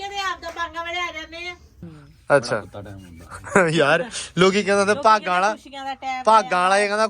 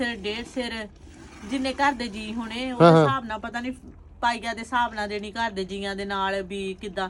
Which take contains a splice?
first; 1 cut; at 1.9 s

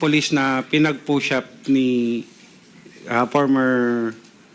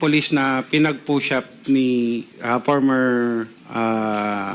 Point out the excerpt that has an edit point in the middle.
second; 2 cuts; at 2.3 s, 3.6 s

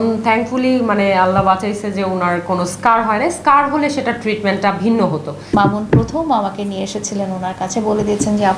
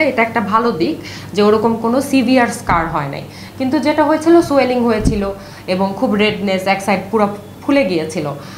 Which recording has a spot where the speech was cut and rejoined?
first; 1 cut; at 5.3 s

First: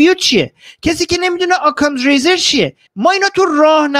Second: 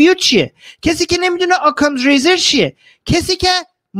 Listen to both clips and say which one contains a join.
first; 1 cut; at 2.8 s

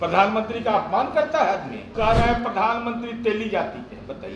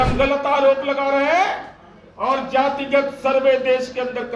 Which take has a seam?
first; 1 cut; at 1.9 s

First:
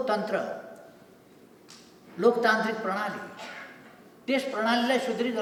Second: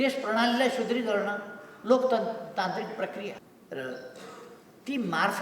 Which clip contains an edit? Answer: second; 1 cut; at 3.4 s

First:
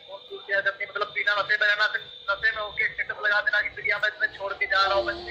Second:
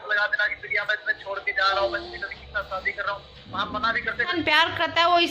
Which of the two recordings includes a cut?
second; 1 cut; at 4.3 s

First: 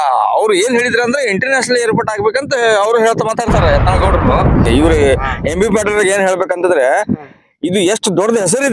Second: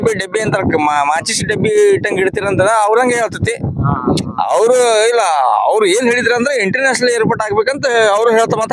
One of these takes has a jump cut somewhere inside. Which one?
first; 1 cut; at 4.7 s

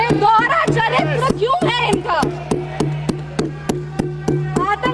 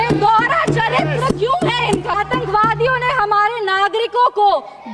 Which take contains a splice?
second; 1 cut; at 2.1 s

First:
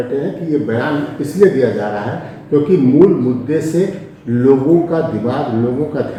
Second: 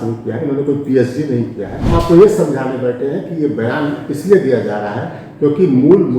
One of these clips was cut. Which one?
second; 1 cut; at 1.8 s

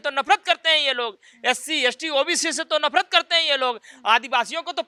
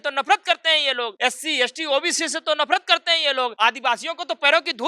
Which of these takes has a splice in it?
second; 2 cuts; at 1.1 s, 3.5 s

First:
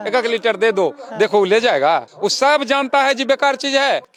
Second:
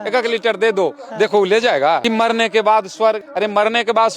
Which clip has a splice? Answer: second; 2 cuts; at 2.0 s, 3.3 s

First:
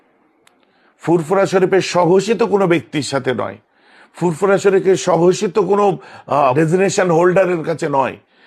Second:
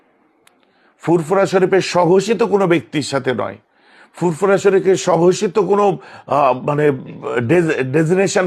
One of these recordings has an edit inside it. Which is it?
first; 1 cut; at 6.5 s

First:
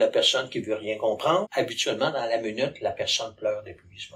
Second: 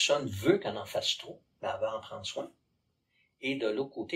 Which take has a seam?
first; 1 cut; at 1.5 s

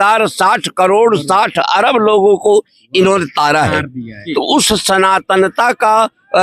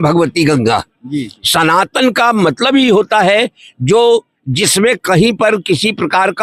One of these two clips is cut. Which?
first; 1 cut; at 4.1 s

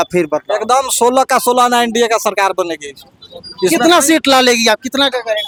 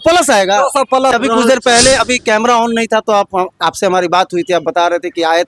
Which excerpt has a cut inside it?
second; 1 cut; at 1.1 s

